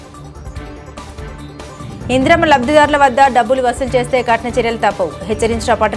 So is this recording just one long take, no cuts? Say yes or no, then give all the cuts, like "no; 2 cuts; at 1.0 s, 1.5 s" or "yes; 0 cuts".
no; 1 cut; at 1.7 s